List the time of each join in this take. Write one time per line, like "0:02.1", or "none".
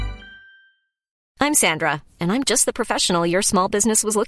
0:01.3